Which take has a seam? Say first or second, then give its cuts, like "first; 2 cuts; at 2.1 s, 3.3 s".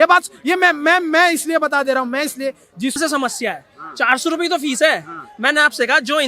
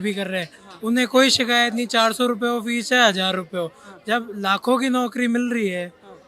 first; 1 cut; at 3.0 s